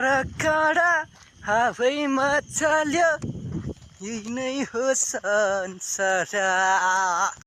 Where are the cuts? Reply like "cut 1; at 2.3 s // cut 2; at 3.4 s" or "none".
none